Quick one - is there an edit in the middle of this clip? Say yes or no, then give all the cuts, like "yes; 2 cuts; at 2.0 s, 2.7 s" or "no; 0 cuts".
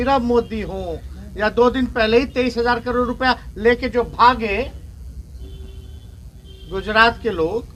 no; 0 cuts